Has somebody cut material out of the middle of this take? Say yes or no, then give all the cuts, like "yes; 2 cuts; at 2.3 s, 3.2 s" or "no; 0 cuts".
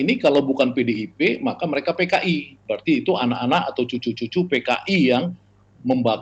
yes; 1 cut; at 2.6 s